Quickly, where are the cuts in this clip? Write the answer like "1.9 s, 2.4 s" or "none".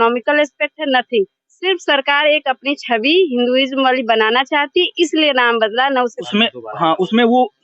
6.2 s